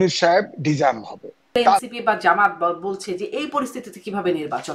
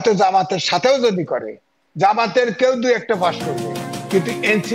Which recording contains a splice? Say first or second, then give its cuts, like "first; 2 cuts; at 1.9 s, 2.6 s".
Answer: first; 1 cut; at 1.8 s